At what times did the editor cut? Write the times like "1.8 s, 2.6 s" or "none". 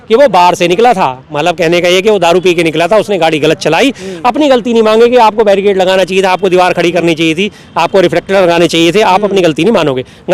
none